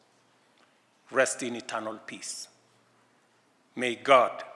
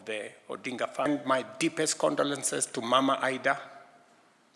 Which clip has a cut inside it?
second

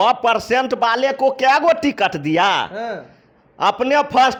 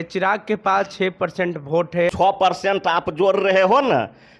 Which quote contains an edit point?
second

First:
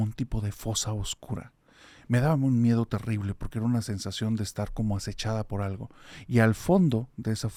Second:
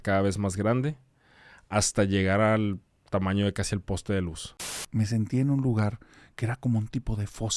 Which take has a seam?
second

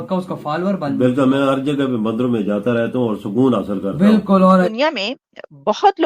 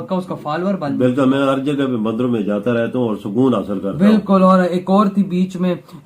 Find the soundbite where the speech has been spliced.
first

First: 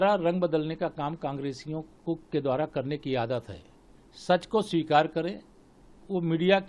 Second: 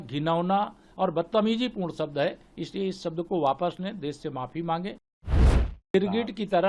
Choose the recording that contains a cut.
second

